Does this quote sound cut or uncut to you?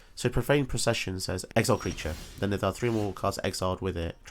cut